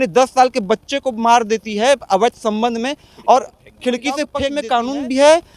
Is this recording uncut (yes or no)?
no